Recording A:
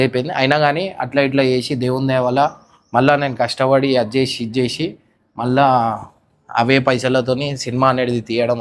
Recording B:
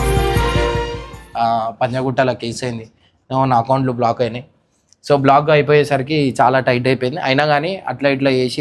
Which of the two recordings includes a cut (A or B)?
B